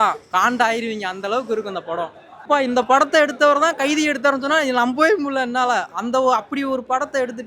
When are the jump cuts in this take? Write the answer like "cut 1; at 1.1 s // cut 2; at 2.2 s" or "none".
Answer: cut 1; at 2.3 s